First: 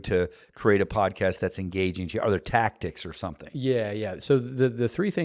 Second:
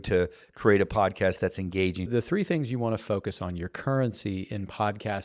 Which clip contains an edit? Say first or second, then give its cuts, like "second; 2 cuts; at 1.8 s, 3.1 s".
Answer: second; 1 cut; at 2.1 s